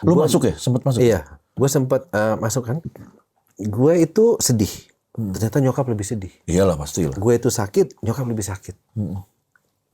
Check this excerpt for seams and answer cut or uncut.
cut